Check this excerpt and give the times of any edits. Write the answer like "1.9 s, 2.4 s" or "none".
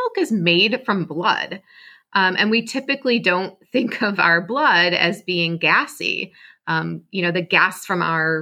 none

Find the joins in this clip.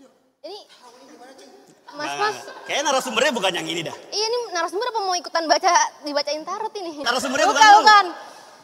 7.1 s

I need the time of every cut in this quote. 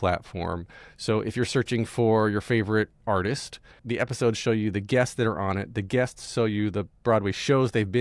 3.8 s

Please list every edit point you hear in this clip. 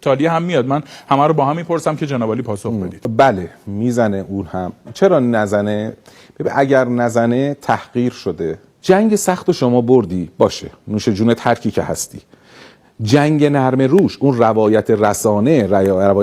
3.0 s, 8.7 s

